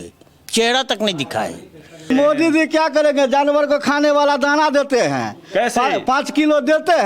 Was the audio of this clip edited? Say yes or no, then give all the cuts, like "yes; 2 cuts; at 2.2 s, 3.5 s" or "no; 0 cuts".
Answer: yes; 1 cut; at 2.1 s